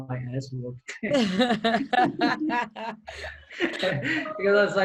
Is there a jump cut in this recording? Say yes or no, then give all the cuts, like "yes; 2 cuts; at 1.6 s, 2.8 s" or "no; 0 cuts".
no; 0 cuts